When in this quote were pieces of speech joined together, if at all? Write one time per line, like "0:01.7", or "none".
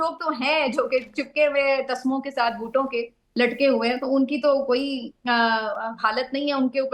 none

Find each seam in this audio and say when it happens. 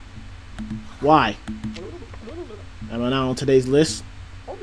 none

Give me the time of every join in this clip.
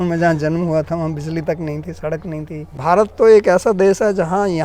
0:02.7

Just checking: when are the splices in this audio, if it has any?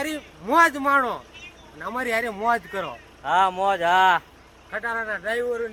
none

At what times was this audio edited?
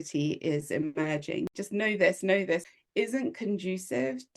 0:01.5
0:02.6

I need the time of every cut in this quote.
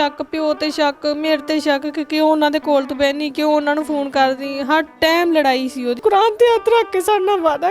0:06.0

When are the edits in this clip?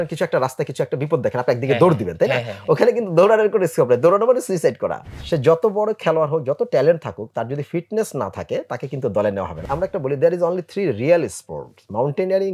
0:05.1
0:09.6

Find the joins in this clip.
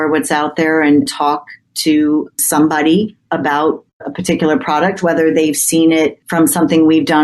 0:06.2

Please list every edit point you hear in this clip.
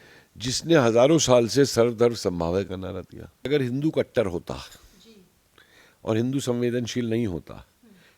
0:03.5

